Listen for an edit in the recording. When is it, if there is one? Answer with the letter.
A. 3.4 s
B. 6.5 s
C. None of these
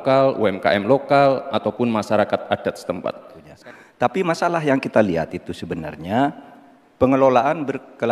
A